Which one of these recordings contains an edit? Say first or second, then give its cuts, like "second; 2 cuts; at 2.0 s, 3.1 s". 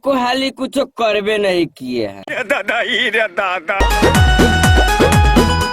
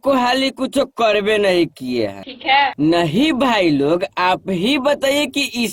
first; 2 cuts; at 2.3 s, 3.8 s